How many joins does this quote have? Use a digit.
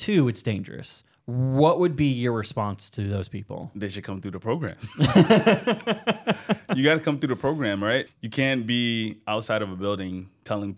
1